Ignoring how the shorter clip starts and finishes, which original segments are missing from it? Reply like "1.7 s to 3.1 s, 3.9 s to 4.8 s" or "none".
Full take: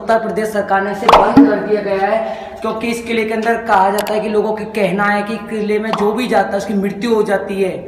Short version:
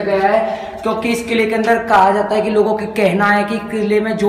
none